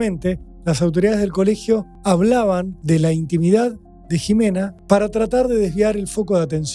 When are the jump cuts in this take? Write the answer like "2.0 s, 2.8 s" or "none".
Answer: 1.9 s, 2.7 s, 4.7 s

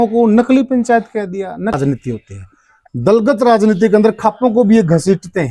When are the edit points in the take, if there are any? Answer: 1.7 s

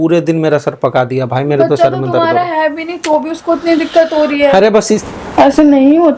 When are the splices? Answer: 5.0 s

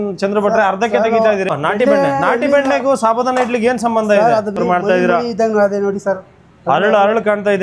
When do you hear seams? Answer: 1.5 s, 4.6 s

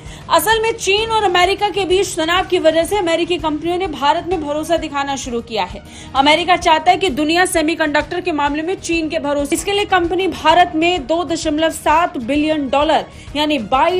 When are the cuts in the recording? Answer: 9.5 s

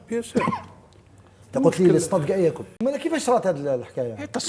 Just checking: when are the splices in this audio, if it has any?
2.7 s

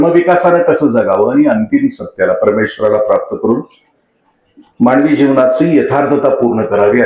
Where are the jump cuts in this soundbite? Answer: none

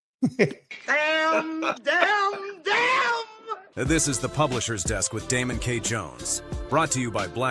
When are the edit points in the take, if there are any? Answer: 3.8 s

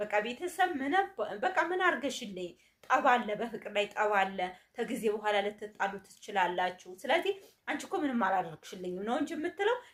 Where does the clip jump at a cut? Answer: none

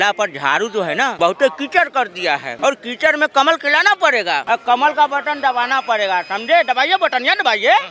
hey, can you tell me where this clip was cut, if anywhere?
1.1 s, 2.5 s, 4.4 s

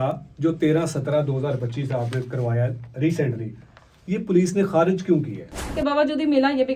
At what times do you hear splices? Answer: 5.8 s

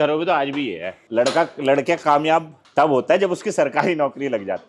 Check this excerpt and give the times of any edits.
0.9 s, 2.6 s

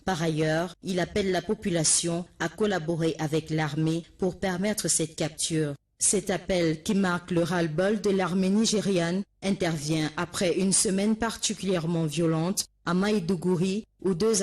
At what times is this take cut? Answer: 4.1 s

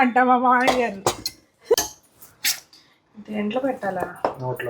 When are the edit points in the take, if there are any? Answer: 1.7 s

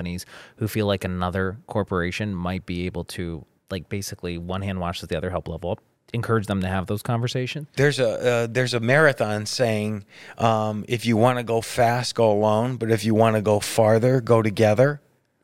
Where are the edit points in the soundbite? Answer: 7.6 s

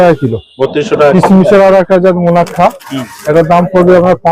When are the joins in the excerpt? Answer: 1.1 s

